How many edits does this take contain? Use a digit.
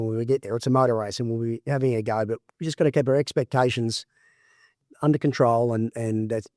1